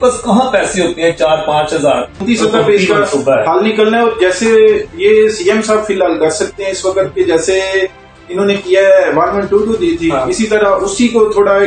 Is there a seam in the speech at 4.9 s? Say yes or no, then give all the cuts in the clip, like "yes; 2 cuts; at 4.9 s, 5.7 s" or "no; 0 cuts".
no; 1 cut; at 2.2 s